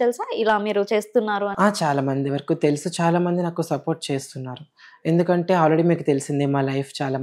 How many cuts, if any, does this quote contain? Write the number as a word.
zero